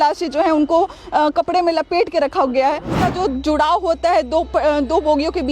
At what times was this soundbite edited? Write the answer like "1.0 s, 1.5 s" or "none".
3.0 s